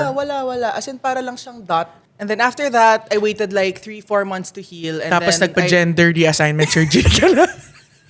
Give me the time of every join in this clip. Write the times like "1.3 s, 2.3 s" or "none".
2.0 s